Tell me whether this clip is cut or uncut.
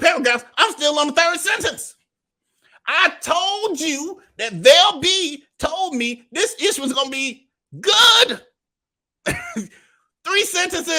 uncut